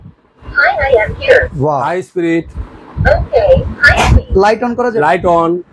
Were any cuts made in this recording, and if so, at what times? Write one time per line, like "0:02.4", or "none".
none